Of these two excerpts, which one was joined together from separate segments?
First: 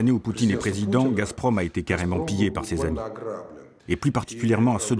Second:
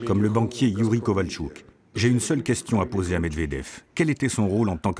first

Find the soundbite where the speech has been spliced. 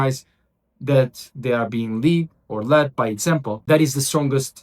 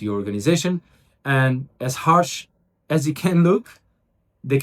first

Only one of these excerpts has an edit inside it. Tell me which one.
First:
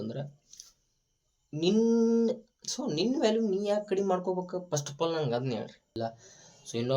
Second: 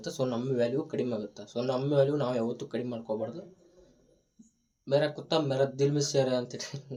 first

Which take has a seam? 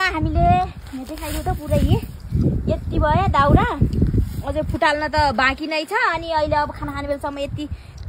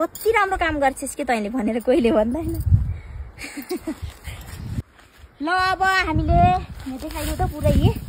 second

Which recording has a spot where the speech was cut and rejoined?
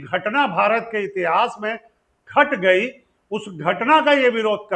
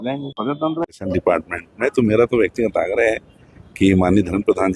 second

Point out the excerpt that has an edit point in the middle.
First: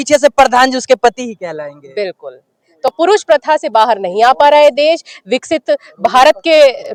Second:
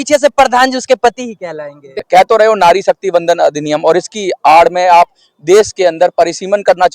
second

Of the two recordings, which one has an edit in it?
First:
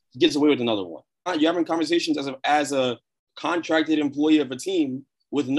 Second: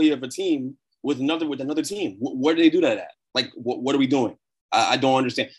first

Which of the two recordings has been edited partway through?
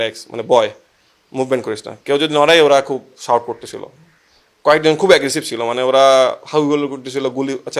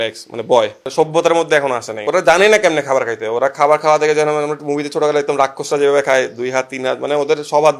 second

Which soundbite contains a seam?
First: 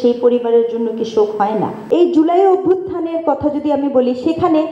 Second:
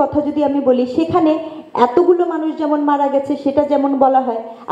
first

